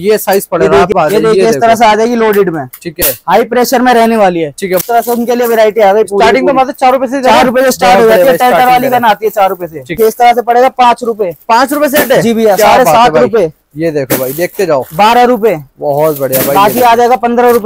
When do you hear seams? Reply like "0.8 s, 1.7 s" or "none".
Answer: 0.9 s, 4.8 s, 10.0 s